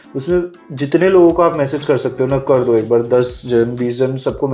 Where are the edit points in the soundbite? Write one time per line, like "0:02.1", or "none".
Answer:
none